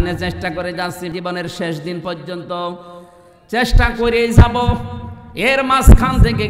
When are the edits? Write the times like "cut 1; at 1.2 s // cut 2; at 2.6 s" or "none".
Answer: cut 1; at 1.1 s

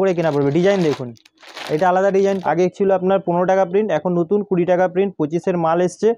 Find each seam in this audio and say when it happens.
cut 1; at 2.4 s

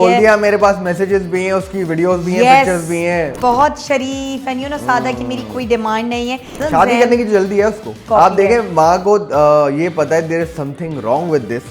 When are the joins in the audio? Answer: cut 1; at 3.3 s // cut 2; at 6.6 s // cut 3; at 8.0 s

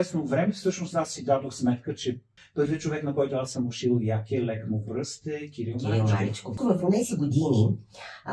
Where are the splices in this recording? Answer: cut 1; at 2.4 s // cut 2; at 6.6 s

